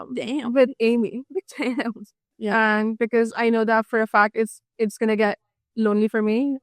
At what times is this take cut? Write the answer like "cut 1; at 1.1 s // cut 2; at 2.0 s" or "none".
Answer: cut 1; at 2.3 s